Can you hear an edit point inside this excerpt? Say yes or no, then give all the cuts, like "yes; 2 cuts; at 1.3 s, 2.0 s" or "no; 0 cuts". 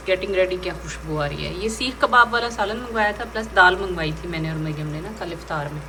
no; 0 cuts